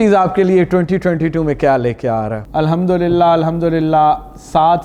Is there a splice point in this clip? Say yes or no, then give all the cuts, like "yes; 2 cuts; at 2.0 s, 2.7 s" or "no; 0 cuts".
yes; 1 cut; at 2.4 s